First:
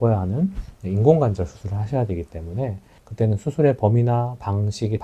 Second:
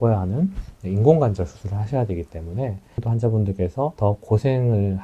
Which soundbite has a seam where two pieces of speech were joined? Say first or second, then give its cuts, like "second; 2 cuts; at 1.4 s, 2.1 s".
second; 1 cut; at 3.0 s